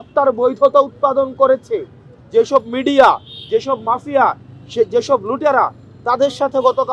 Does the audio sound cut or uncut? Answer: uncut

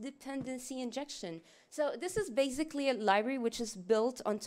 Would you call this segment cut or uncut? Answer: uncut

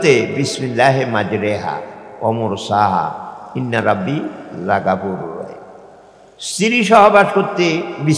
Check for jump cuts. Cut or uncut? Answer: uncut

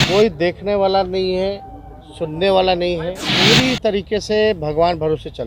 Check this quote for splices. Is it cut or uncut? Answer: cut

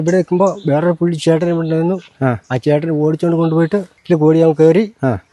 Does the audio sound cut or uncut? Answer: cut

